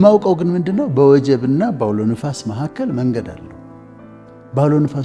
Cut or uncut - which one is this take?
uncut